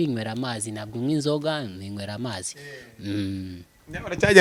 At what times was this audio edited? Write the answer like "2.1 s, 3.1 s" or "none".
none